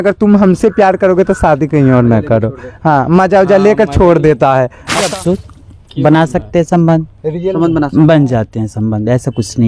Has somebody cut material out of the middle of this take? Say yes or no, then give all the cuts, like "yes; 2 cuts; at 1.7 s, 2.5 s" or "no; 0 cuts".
yes; 1 cut; at 5.1 s